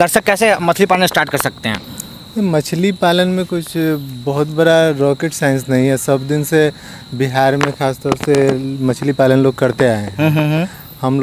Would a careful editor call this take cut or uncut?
uncut